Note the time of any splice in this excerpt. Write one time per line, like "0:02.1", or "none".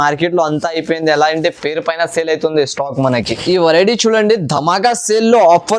0:03.3